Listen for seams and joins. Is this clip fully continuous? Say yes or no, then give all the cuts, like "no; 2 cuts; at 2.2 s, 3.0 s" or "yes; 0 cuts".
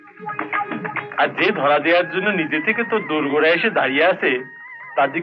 yes; 0 cuts